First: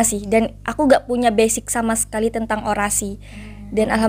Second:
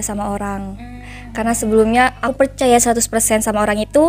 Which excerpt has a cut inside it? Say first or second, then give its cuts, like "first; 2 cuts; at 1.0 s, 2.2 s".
second; 1 cut; at 2.2 s